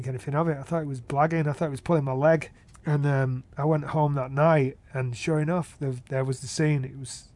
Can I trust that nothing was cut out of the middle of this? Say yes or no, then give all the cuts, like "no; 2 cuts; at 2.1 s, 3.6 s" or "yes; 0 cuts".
no; 1 cut; at 2.6 s